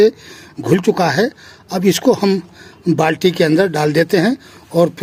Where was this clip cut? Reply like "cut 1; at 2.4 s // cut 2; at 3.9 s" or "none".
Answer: none

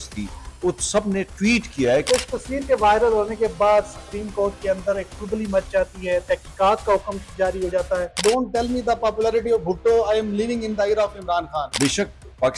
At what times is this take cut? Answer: cut 1; at 2.1 s // cut 2; at 8.1 s // cut 3; at 11.7 s

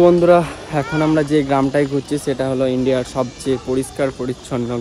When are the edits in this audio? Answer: none

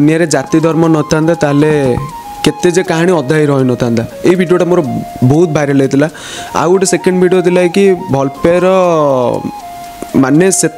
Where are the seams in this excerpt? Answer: none

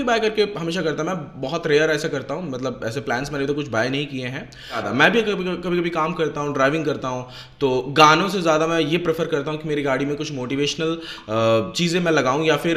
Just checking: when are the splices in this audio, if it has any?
cut 1; at 4.9 s

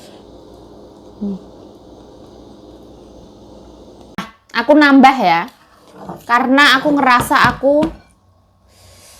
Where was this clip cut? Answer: cut 1; at 4.0 s

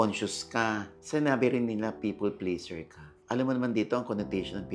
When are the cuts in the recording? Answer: none

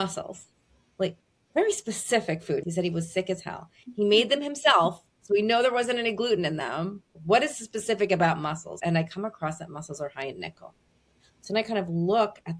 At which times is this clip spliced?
cut 1; at 2.6 s // cut 2; at 7.1 s // cut 3; at 8.8 s

